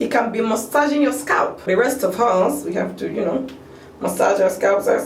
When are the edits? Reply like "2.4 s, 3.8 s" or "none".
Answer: 1.6 s